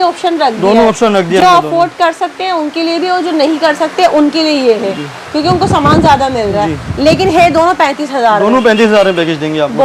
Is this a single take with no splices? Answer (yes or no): yes